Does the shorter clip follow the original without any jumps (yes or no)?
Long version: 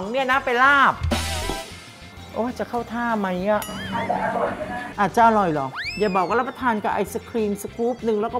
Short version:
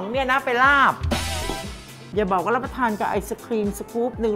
no